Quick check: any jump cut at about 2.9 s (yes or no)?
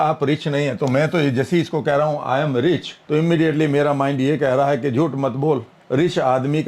yes